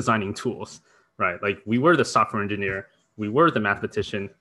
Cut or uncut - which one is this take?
uncut